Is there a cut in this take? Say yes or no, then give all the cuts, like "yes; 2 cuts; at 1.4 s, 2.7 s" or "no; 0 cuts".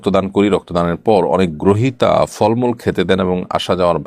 no; 0 cuts